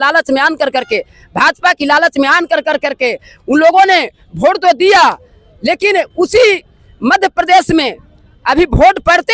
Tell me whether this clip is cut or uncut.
uncut